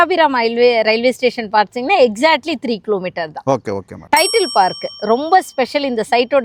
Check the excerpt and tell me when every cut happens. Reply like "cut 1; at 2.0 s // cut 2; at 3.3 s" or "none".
none